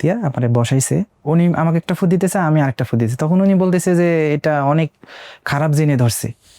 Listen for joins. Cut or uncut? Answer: cut